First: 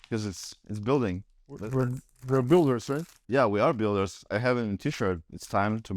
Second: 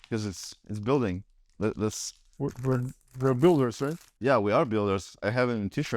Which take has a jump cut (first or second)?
first